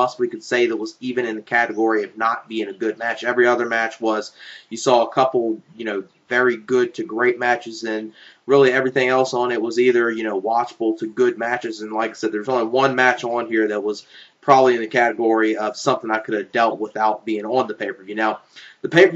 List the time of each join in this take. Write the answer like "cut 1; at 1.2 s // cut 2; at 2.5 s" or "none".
cut 1; at 16.2 s